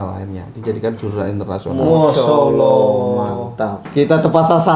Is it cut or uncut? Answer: cut